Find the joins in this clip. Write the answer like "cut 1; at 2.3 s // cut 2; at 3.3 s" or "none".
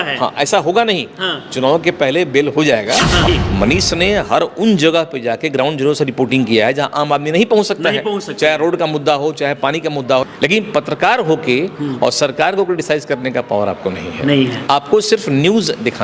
cut 1; at 3.3 s // cut 2; at 10.2 s